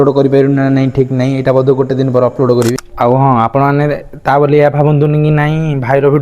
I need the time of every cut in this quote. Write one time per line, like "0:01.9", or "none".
0:02.8